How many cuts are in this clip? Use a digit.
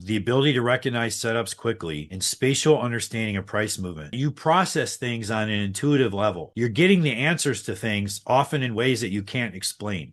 1